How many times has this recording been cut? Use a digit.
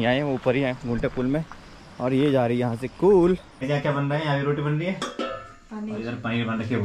1